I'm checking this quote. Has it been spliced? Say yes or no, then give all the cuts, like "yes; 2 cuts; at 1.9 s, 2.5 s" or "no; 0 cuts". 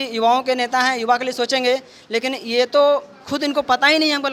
no; 0 cuts